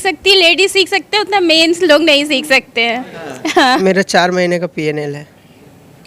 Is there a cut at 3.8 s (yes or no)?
yes